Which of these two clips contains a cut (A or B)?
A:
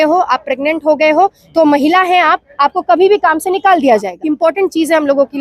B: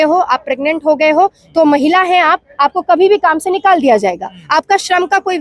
A